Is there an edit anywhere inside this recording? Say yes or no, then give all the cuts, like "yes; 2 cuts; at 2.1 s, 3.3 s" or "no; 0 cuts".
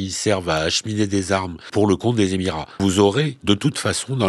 yes; 3 cuts; at 1.7 s, 2.7 s, 3.3 s